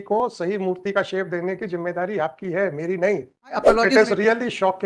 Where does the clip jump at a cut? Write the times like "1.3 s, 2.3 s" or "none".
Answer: 3.6 s

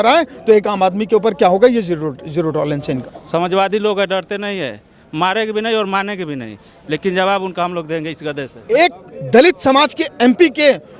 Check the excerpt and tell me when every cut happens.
3.1 s, 8.7 s

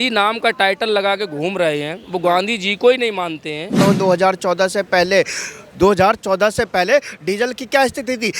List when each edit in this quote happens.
3.8 s

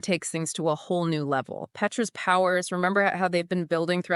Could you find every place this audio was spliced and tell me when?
none

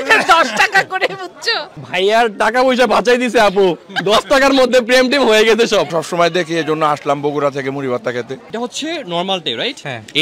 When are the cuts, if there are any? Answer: 5.9 s, 8.4 s

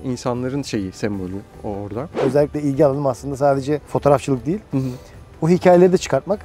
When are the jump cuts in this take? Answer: 2.0 s

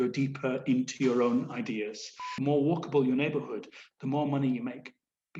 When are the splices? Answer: 2.3 s

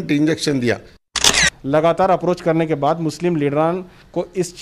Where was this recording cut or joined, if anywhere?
1.3 s

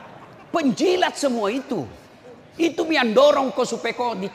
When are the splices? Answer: none

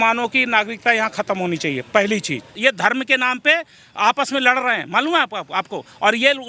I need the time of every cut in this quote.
2.5 s

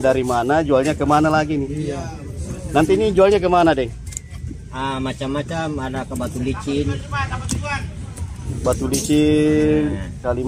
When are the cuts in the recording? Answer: none

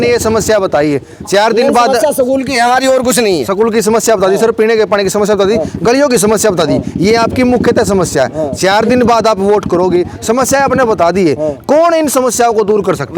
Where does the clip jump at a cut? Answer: none

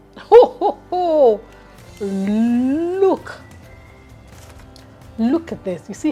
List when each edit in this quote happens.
none

